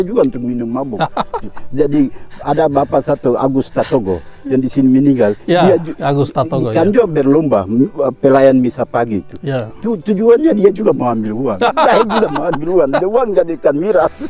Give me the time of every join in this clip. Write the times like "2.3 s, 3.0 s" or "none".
none